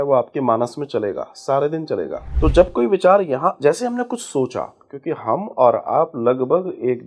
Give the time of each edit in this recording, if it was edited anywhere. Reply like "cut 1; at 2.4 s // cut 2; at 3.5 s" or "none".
cut 1; at 2.2 s

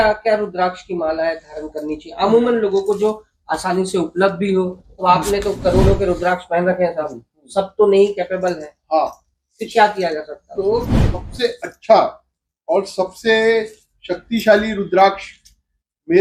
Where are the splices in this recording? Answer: none

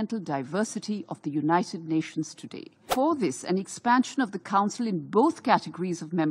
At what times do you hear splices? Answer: cut 1; at 2.9 s

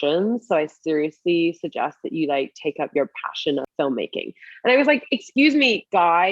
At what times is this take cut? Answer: cut 1; at 3.7 s

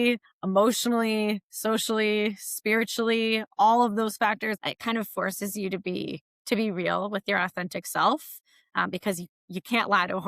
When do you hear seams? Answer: cut 1; at 4.6 s

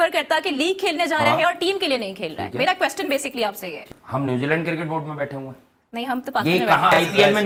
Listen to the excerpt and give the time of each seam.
none

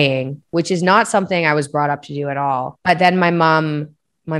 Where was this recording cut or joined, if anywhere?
cut 1; at 2.7 s

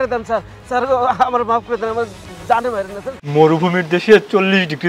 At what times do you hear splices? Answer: cut 1; at 3.1 s

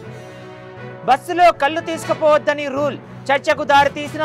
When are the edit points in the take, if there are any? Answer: cut 1; at 0.9 s

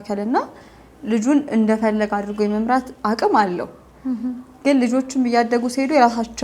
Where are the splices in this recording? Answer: none

